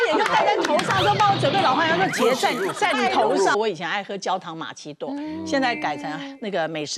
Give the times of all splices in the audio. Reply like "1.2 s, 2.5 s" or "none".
3.5 s